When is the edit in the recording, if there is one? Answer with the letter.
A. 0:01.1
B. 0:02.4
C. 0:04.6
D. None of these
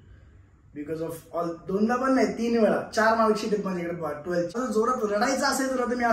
C